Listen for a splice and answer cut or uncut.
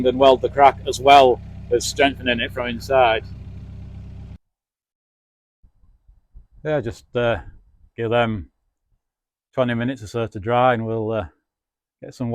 cut